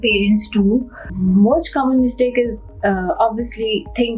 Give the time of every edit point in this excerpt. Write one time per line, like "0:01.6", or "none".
0:01.1

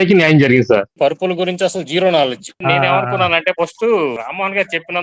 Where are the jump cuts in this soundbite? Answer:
0:00.9
0:02.6
0:04.2

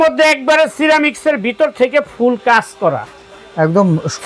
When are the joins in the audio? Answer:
none

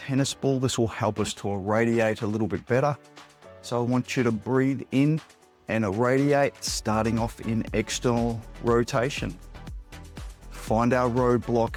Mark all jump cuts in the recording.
none

